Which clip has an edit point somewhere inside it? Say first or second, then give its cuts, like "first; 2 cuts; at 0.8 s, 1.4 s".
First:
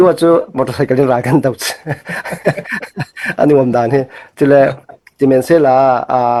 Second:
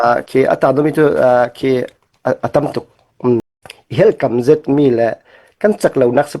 second; 1 cut; at 3.6 s